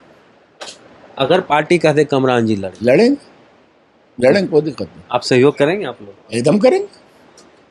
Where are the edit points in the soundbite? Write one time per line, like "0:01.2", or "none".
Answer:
none